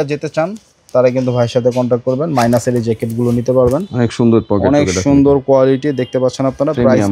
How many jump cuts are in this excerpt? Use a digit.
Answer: 0